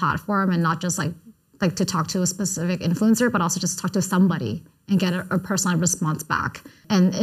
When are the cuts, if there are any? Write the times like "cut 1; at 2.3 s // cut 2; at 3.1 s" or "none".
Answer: none